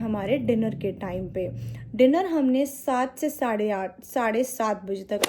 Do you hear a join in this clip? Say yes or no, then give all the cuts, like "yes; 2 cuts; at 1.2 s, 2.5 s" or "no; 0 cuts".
no; 0 cuts